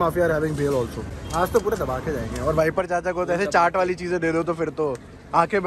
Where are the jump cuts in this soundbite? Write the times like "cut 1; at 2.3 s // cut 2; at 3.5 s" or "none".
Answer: none